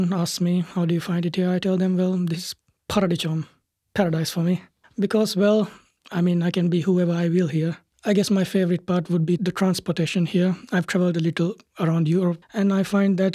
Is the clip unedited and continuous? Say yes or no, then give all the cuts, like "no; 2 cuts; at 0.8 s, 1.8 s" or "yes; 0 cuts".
no; 1 cut; at 7.9 s